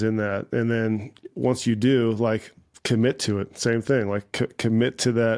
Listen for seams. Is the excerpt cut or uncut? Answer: uncut